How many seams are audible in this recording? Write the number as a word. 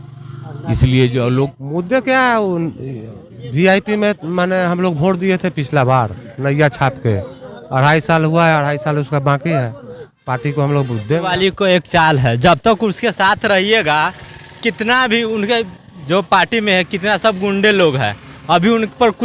two